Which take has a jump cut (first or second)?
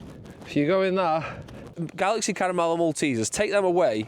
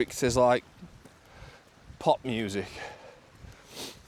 first